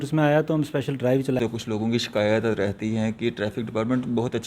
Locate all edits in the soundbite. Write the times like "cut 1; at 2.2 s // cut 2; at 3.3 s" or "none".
cut 1; at 1.4 s